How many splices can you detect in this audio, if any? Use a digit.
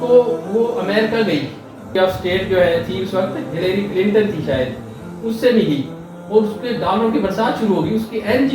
1